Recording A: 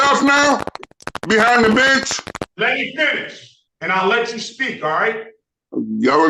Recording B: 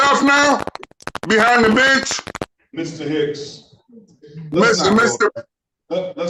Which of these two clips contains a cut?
A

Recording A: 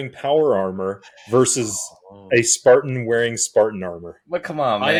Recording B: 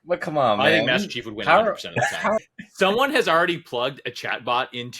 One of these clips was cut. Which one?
B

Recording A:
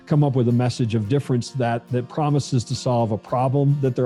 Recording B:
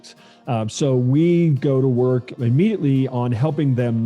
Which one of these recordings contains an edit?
B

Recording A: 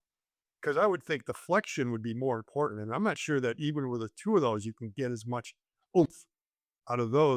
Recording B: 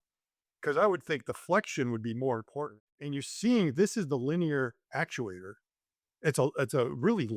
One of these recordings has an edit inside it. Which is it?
B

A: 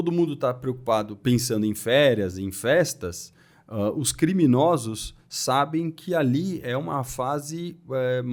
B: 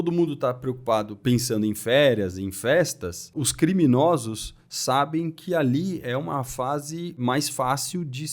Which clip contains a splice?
B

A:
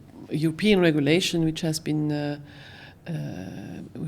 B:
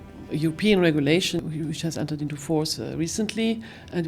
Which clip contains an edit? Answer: B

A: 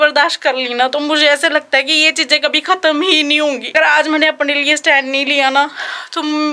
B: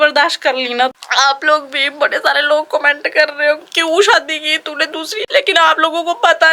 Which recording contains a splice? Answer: B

